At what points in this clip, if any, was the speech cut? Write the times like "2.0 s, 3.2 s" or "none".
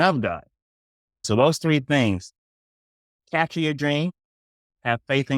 1.2 s